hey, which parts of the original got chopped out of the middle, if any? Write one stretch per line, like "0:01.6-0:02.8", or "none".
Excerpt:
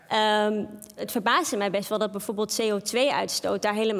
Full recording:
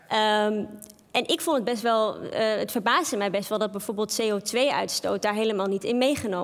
0:01.0-0:02.6